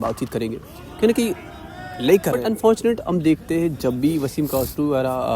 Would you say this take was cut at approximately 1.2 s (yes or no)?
no